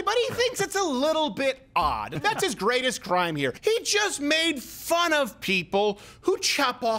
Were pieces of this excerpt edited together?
yes; 2 cuts; at 2.1 s, 3.6 s

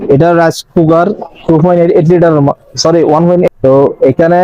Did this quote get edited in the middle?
yes; 1 cut; at 3.5 s

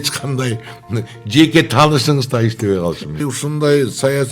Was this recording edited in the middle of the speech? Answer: yes; 1 cut; at 3.2 s

